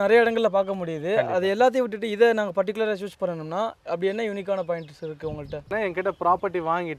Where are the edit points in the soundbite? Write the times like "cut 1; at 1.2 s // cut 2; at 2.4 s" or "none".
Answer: cut 1; at 5.7 s